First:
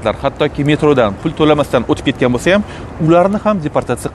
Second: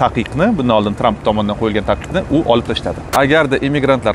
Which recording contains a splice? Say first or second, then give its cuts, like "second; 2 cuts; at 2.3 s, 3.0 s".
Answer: second; 1 cut; at 3.1 s